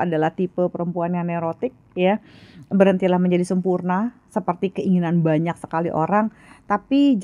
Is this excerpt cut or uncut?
uncut